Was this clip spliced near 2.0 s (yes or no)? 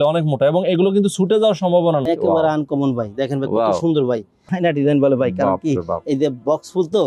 yes